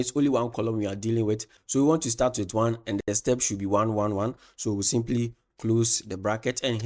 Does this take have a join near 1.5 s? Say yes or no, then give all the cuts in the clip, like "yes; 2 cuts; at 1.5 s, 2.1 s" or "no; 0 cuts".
no; 0 cuts